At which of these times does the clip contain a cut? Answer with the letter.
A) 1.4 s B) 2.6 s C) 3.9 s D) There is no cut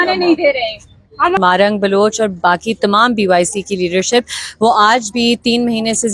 A